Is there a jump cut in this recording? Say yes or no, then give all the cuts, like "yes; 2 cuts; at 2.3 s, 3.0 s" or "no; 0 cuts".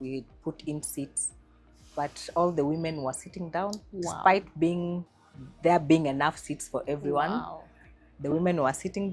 no; 0 cuts